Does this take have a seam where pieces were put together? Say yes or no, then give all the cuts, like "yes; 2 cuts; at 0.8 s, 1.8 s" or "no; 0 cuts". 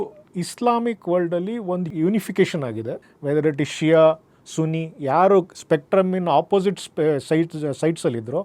no; 0 cuts